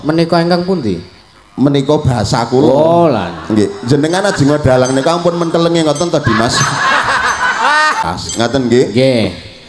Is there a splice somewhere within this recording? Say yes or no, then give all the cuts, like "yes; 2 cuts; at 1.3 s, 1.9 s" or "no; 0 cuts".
yes; 1 cut; at 8.0 s